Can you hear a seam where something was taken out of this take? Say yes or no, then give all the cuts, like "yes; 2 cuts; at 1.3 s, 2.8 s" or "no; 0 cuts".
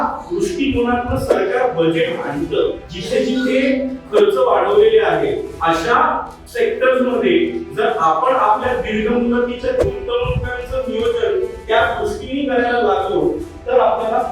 yes; 3 cuts; at 2.9 s, 5.5 s, 6.4 s